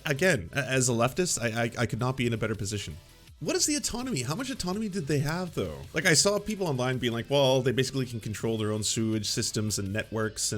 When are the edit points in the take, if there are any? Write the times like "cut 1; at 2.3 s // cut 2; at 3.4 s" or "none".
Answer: cut 1; at 3.4 s // cut 2; at 5.9 s